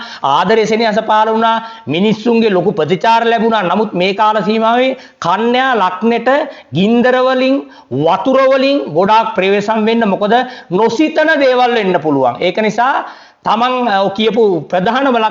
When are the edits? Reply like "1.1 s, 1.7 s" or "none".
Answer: none